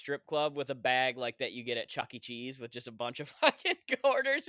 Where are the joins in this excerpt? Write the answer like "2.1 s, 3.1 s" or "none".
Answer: none